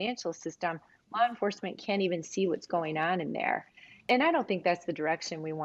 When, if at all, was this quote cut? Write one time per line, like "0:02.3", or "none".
0:04.0